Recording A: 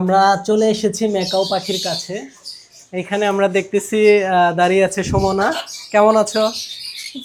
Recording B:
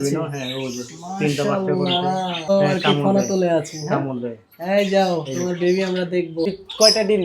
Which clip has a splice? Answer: B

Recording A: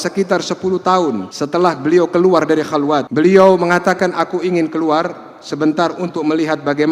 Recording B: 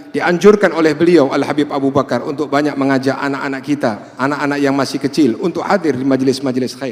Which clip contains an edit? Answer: A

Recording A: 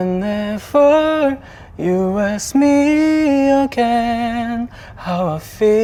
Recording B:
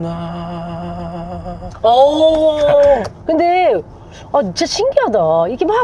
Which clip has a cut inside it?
B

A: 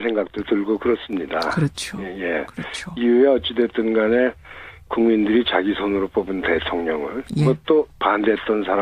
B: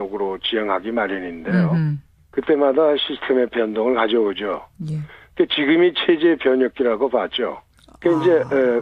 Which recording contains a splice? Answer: B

